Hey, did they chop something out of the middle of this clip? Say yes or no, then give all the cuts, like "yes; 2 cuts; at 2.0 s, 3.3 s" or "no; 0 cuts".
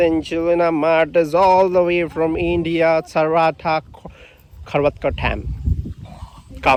no; 0 cuts